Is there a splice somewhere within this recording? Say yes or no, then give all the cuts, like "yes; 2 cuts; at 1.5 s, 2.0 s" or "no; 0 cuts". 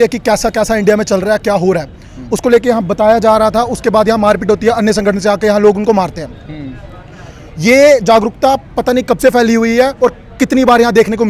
no; 0 cuts